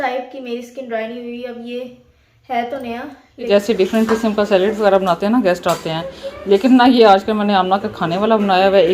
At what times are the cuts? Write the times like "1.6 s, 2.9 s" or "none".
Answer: 3.5 s